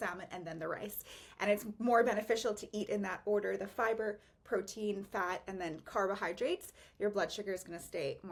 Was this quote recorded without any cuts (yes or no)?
yes